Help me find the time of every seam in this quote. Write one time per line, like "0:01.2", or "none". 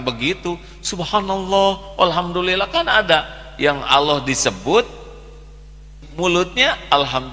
0:06.0